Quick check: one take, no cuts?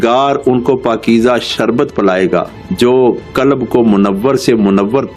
yes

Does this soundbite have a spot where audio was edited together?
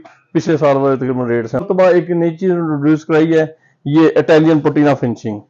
yes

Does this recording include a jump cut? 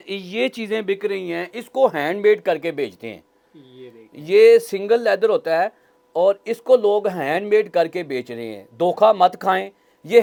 no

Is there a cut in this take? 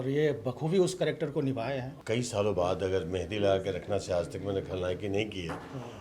yes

